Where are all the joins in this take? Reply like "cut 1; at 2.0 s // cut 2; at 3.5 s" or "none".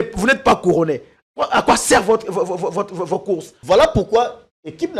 cut 1; at 3.5 s